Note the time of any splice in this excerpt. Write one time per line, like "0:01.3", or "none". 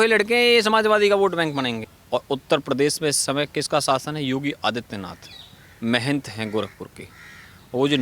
0:01.8